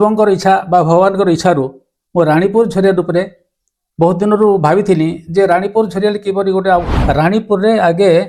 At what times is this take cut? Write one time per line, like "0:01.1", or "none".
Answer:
0:06.9